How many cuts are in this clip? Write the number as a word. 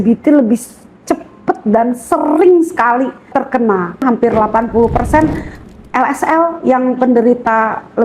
one